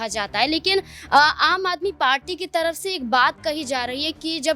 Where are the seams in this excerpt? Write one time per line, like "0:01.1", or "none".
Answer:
none